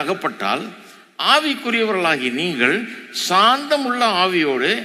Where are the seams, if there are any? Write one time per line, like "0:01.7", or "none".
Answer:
none